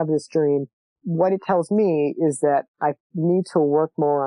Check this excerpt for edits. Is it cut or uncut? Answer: cut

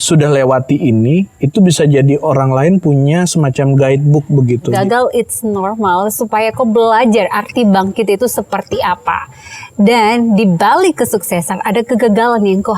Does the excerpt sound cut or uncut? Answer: cut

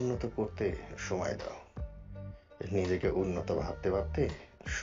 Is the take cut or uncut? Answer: uncut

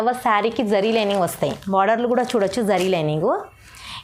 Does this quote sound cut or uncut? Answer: uncut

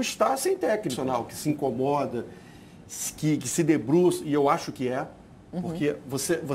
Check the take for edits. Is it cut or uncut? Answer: cut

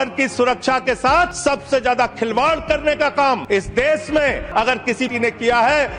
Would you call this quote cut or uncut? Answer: cut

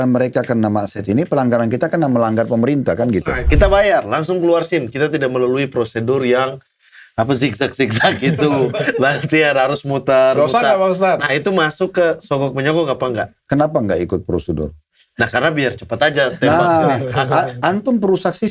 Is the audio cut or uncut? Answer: cut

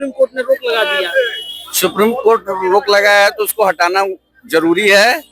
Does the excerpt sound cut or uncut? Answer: uncut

